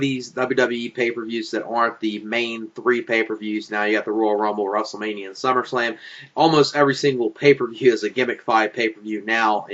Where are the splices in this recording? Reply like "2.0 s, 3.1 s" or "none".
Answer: 8.4 s